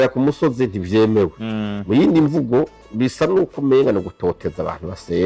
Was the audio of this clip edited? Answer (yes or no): no